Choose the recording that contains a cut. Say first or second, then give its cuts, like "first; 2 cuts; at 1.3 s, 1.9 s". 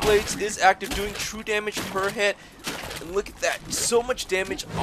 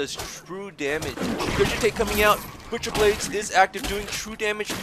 second; 1 cut; at 1.1 s